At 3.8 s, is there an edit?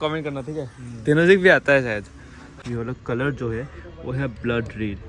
no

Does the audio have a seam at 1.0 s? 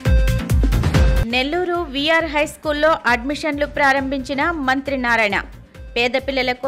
yes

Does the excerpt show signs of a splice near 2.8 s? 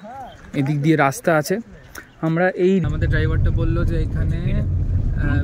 yes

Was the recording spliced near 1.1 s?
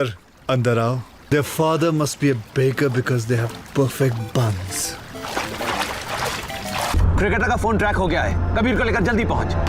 yes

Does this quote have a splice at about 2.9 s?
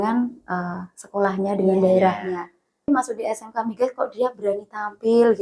yes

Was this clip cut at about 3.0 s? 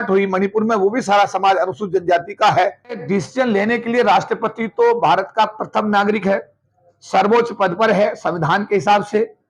yes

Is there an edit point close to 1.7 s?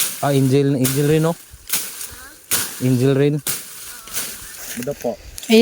no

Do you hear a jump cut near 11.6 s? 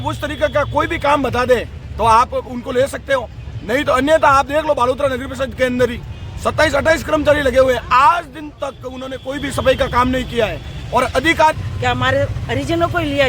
yes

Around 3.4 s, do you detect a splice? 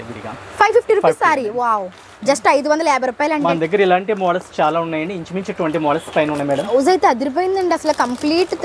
yes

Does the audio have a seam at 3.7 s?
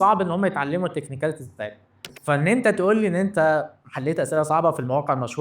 no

